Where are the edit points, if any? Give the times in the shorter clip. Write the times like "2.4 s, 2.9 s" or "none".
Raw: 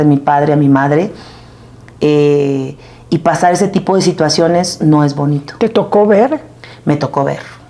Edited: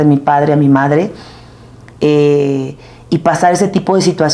none